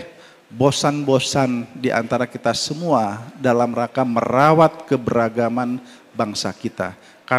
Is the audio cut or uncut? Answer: uncut